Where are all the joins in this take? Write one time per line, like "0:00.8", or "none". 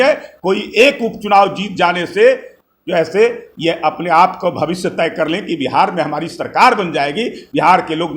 none